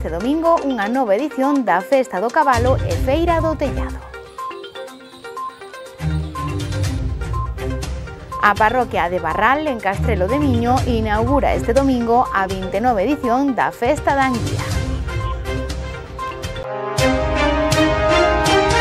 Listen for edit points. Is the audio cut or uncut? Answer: cut